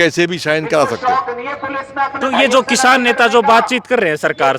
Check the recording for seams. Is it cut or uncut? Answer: uncut